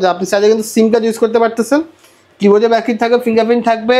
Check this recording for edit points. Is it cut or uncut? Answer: uncut